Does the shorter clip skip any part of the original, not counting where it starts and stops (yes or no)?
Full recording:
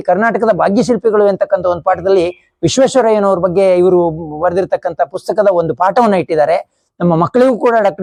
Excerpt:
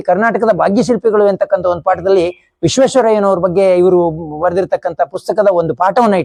no